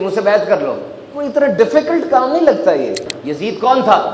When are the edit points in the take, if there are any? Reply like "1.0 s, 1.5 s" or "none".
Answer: 3.0 s